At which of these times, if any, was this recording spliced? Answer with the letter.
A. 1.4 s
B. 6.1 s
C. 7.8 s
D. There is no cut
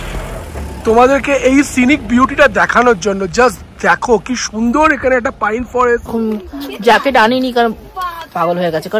B